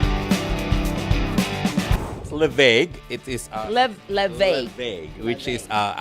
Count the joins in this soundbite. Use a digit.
1